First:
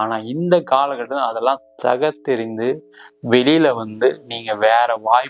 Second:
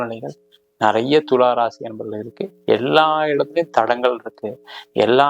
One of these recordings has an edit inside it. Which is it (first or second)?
second